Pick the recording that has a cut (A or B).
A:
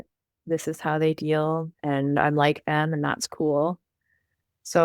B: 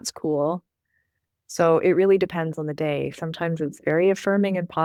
A